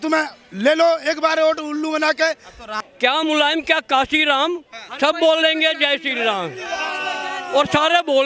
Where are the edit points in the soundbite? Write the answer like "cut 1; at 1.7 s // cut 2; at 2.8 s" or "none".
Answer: cut 1; at 2.7 s